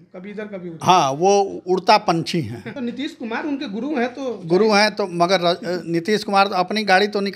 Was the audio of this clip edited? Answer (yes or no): yes